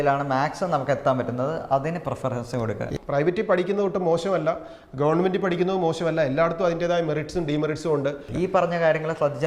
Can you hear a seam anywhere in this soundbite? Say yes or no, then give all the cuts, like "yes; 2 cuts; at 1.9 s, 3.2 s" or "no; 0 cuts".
yes; 2 cuts; at 3.0 s, 8.2 s